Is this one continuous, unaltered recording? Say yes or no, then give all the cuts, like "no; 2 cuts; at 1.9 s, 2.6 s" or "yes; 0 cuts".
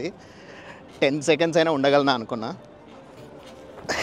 no; 1 cut; at 3.1 s